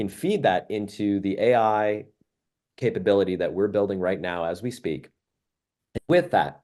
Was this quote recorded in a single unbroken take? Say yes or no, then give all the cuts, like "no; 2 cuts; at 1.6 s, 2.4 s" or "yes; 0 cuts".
yes; 0 cuts